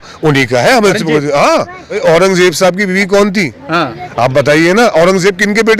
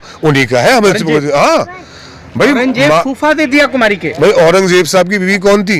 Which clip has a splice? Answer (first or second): first